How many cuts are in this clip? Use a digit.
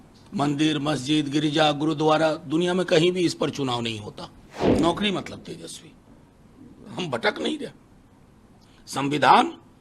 1